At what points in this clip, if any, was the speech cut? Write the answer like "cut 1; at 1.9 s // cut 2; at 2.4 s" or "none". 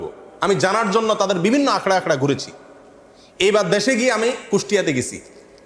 none